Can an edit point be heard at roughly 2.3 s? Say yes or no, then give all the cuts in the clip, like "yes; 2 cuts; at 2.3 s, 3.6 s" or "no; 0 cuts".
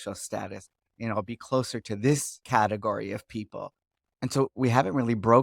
yes; 1 cut; at 2.3 s